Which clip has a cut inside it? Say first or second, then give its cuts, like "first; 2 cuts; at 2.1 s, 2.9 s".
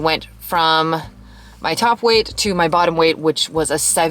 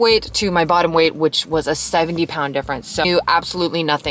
second; 1 cut; at 3.0 s